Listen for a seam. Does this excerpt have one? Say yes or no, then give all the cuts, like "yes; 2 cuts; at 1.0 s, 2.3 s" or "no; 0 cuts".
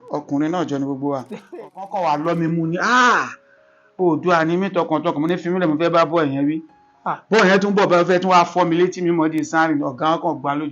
yes; 1 cut; at 1.6 s